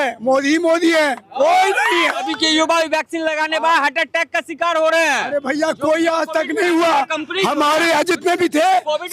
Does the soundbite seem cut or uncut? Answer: cut